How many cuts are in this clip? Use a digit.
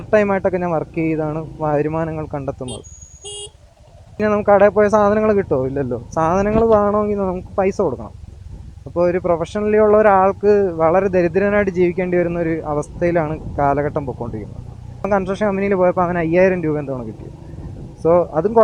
2